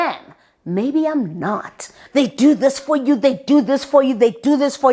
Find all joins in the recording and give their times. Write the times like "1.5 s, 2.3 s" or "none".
1.9 s